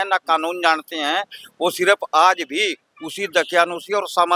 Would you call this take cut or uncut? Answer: uncut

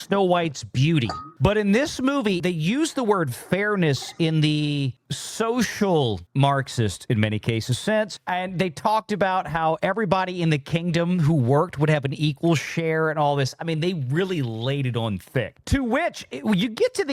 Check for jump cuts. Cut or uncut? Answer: cut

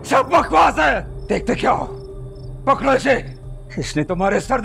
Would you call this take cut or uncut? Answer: cut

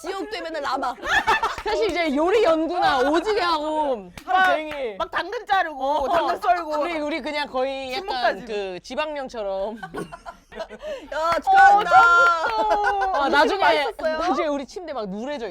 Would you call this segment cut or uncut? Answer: cut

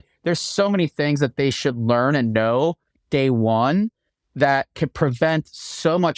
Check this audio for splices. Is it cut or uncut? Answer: uncut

